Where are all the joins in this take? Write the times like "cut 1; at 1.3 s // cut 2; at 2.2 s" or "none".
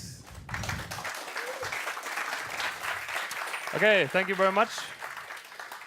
cut 1; at 4.7 s